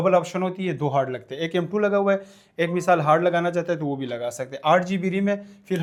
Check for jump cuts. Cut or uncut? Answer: uncut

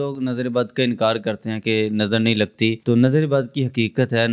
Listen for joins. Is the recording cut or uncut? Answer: cut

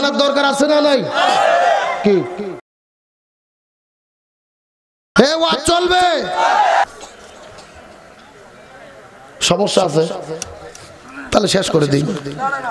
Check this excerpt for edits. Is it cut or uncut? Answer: cut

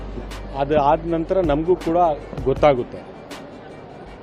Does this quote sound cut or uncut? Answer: uncut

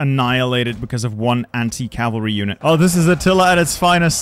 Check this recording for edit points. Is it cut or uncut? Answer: cut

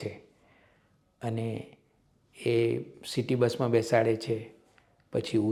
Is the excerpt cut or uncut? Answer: uncut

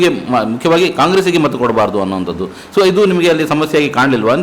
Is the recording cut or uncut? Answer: uncut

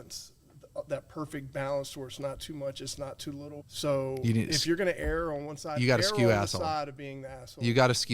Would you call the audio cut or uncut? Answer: cut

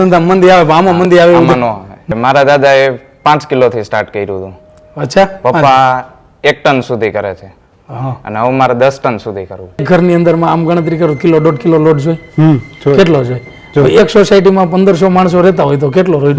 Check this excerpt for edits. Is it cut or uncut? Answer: cut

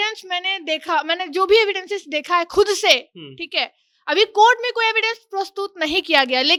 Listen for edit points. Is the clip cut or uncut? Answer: uncut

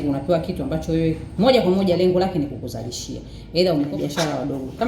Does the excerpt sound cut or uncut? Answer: cut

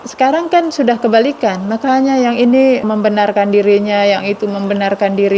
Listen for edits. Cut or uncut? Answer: cut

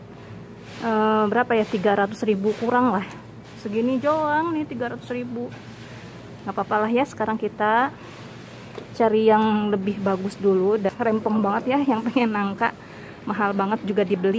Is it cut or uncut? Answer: cut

